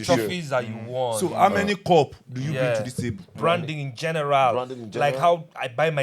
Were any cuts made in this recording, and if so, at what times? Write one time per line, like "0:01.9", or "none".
0:03.3